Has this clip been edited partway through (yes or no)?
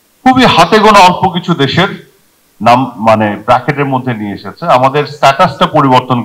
no